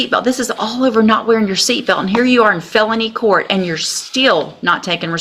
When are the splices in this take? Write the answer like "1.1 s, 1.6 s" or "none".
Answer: none